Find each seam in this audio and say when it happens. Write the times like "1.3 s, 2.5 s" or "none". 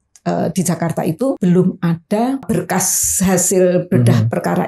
1.4 s, 2.4 s